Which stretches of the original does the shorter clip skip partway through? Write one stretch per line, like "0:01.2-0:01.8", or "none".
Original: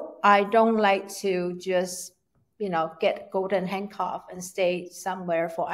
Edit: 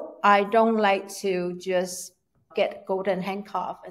0:02.5-0:02.9

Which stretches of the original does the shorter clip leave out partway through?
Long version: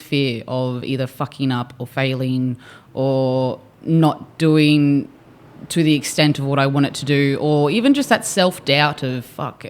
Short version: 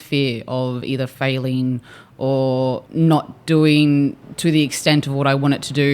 0:01.1-0:01.9
0:03.6-0:03.8
0:05.2-0:05.6

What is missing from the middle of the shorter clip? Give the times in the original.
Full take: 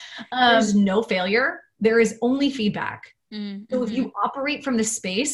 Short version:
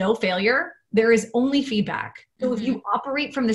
0:03.1-0:03.5

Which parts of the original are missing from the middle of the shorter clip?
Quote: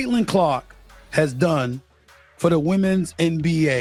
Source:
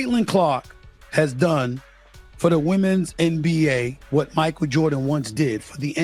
none

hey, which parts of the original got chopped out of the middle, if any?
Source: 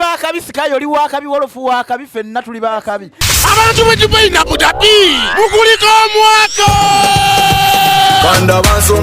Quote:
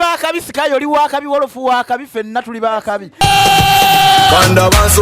0:03.2-0:07.1

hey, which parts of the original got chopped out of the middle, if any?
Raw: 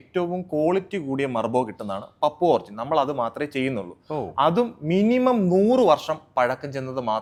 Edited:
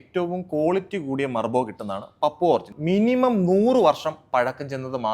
0:02.7-0:04.8

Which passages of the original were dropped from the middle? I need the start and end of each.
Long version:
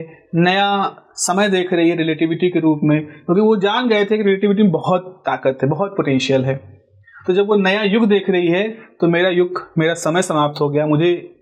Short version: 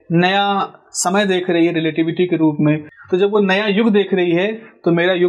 0:03.1-0:07.1

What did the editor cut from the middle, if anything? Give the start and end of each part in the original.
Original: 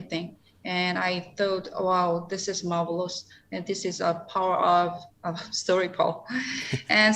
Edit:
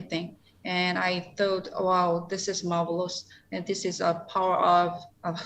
none

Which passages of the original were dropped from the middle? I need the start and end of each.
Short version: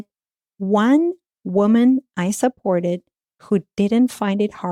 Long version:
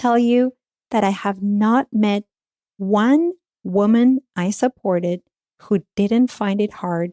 none

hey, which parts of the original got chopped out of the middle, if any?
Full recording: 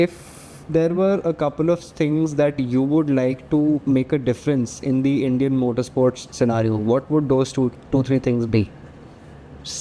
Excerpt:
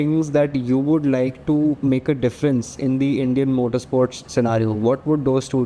none

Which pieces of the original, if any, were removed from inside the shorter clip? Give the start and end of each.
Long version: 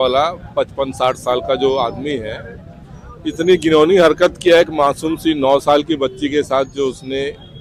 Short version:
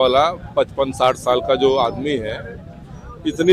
none

